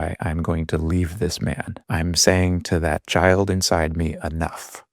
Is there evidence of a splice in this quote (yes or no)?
yes